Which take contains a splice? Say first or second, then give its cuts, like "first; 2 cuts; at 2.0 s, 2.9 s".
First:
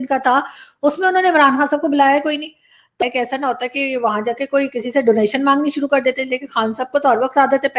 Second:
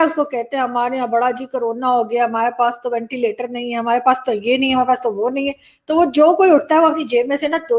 first; 1 cut; at 3.0 s